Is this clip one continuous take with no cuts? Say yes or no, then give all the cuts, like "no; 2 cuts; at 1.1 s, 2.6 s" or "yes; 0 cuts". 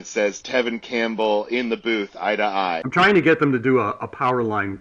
no; 1 cut; at 2.8 s